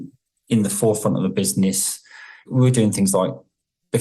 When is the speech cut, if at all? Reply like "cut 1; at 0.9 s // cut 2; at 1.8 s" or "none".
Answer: cut 1; at 2.4 s